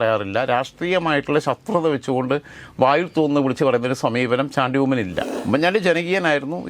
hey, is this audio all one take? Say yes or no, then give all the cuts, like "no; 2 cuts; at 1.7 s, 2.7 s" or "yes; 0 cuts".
no; 1 cut; at 5.3 s